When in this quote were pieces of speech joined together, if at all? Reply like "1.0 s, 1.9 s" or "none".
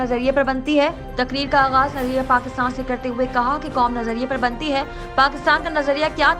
none